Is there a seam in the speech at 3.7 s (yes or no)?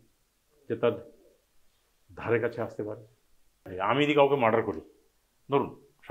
yes